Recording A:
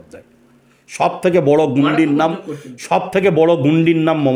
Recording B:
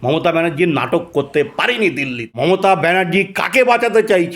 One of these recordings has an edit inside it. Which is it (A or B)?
B